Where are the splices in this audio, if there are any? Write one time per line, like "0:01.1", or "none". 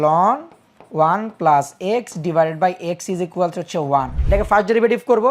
0:04.2